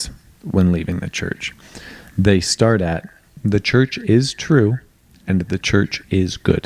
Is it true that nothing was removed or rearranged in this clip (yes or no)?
no